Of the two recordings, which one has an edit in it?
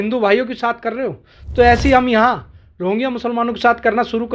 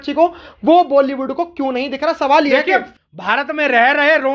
second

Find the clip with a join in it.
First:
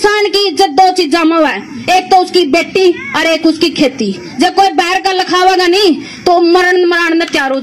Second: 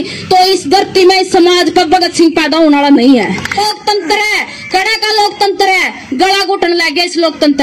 second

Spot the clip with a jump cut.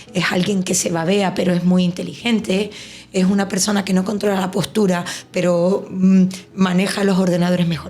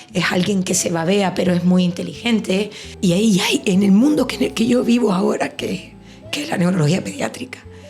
second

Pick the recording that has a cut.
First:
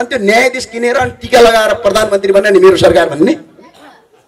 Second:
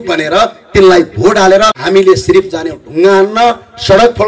second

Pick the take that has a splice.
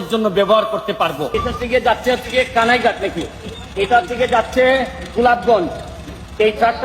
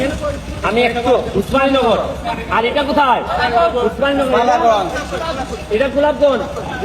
first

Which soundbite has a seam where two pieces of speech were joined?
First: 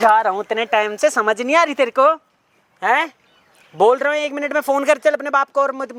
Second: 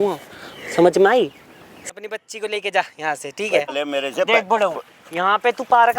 second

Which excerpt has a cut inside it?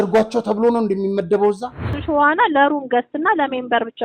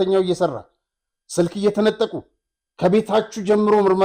first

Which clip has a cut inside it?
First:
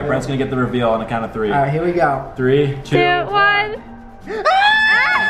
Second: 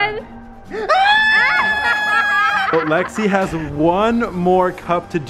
second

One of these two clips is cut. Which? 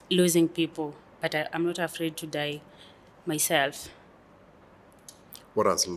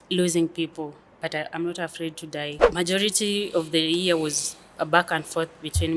second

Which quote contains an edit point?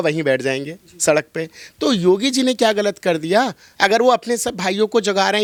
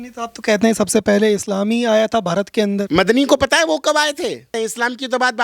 second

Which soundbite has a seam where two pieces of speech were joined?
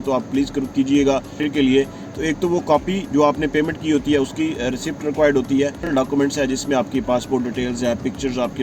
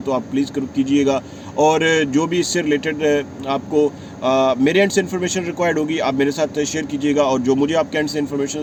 first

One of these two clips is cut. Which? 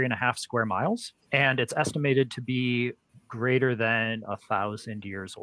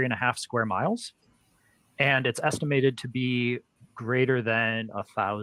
first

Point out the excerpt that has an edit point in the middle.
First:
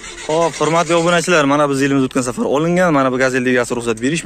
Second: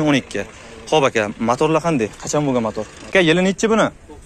second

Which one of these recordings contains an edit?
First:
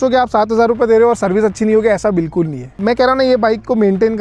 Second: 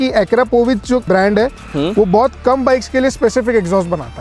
first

